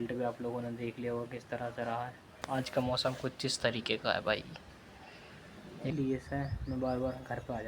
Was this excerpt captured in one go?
no; 2 cuts; at 2.3 s, 5.9 s

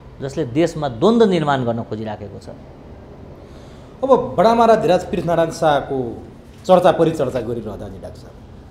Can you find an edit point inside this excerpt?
no; 0 cuts

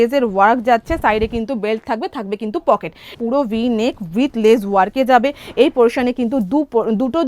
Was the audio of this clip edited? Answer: yes; 1 cut; at 3.1 s

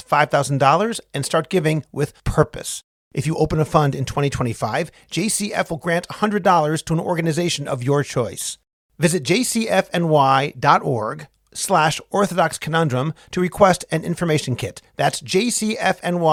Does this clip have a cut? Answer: no; 0 cuts

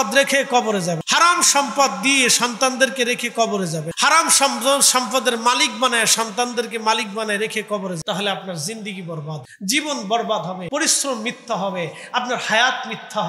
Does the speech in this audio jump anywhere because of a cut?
yes; 5 cuts; at 1.0 s, 3.9 s, 8.0 s, 9.5 s, 10.6 s

